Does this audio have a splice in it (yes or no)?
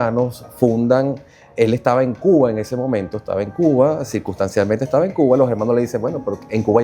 no